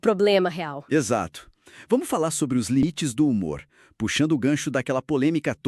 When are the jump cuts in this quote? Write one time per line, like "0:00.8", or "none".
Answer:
0:02.8